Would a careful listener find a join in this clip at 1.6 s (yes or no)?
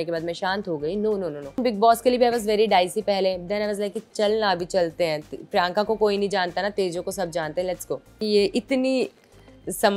yes